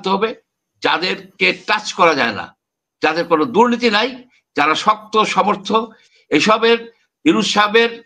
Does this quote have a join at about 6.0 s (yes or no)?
yes